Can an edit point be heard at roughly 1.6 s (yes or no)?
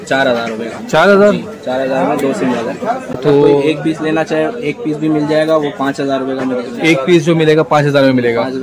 no